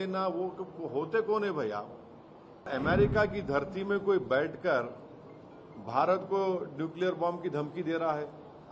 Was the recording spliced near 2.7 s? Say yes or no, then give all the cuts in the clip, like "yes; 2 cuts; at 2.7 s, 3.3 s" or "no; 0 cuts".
yes; 1 cut; at 2.7 s